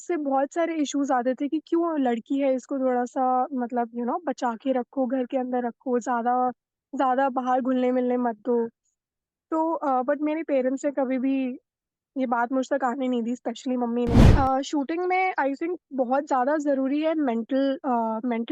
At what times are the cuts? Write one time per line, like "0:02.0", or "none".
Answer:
0:14.3